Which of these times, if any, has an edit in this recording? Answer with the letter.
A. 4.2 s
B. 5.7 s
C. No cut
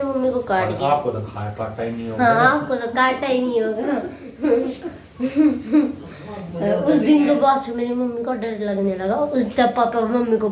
C